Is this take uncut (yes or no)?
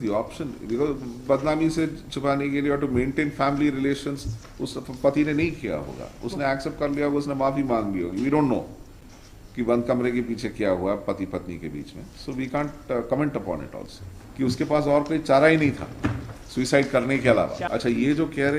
no